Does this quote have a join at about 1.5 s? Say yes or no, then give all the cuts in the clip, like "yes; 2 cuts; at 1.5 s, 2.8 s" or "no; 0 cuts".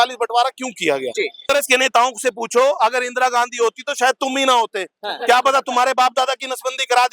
yes; 1 cut; at 1.5 s